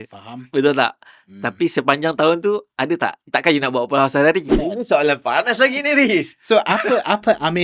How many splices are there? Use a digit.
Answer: 1